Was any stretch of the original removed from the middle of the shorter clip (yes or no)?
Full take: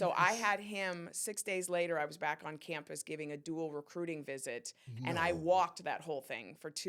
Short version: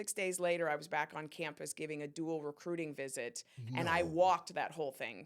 no